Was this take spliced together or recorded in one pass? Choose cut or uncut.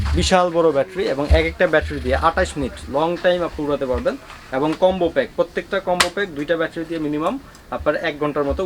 uncut